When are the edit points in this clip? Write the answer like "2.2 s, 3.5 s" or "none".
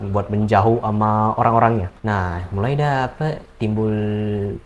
1.9 s